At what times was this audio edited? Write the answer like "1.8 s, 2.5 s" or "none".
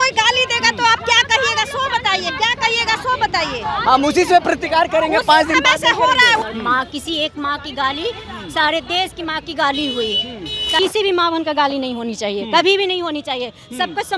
6.5 s, 10.8 s